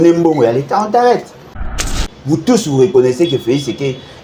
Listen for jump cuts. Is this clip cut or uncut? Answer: cut